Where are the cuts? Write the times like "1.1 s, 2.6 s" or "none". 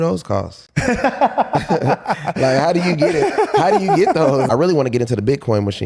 4.5 s